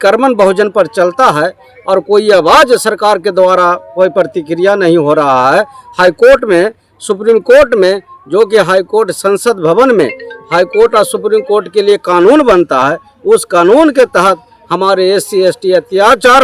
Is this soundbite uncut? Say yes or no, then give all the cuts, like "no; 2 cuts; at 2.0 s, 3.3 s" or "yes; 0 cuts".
yes; 0 cuts